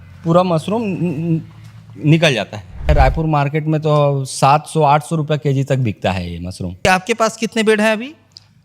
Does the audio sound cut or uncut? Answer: cut